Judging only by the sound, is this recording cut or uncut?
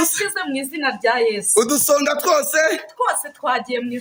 uncut